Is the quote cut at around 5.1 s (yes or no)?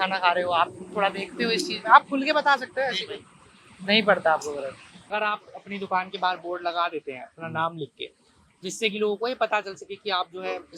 yes